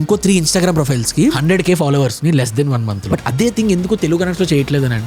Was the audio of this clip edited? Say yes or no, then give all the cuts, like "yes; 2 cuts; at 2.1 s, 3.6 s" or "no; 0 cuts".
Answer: yes; 2 cuts; at 1.4 s, 3.0 s